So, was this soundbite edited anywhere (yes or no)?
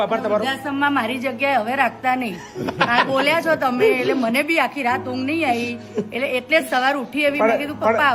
no